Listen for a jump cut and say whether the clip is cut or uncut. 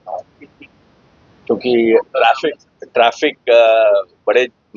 uncut